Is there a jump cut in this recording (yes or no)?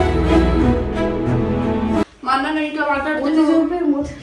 no